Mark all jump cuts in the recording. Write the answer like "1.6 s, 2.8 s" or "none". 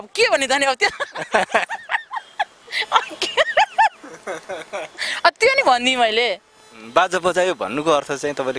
none